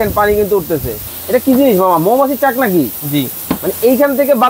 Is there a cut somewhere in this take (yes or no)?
yes